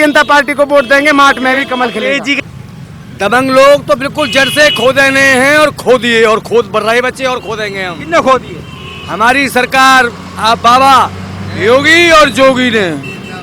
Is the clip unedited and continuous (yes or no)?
no